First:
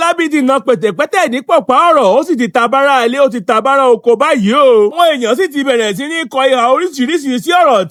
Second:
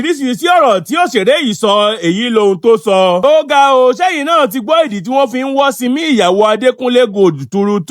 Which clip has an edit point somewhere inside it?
second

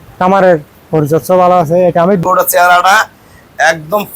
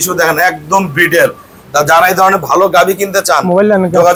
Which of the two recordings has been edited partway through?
first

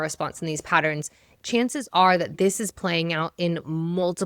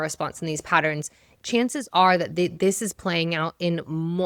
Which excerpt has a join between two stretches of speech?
first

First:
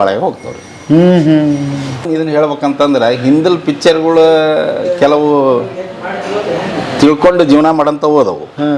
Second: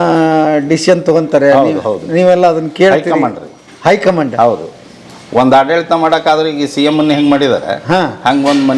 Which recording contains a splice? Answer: first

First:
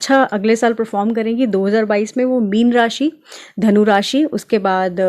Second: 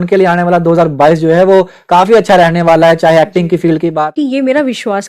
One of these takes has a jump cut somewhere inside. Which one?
second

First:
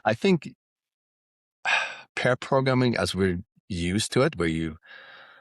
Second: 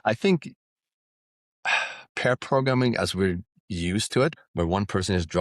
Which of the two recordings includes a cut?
second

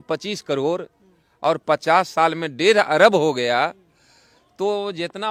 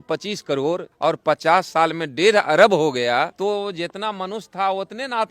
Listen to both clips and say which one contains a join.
second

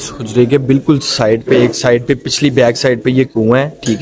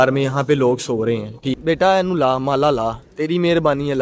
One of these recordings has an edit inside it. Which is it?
second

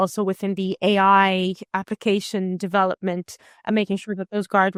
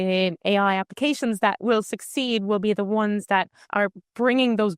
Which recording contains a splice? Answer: second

